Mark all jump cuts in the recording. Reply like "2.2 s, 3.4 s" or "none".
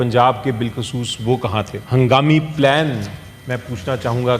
1.8 s